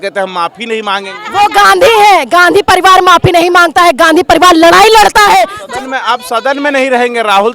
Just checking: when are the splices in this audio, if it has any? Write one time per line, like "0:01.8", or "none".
0:01.2
0:05.6